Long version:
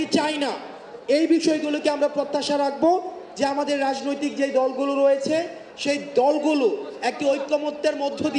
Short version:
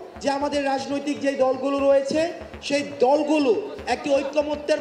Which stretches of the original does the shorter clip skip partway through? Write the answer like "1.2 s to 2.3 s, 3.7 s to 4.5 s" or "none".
none